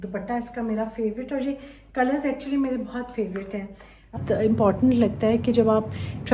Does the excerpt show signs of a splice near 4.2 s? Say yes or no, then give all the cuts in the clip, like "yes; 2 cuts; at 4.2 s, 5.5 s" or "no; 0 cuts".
yes; 1 cut; at 4.2 s